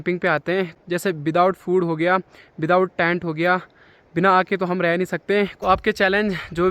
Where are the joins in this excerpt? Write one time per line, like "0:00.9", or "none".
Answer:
0:00.8
0:05.5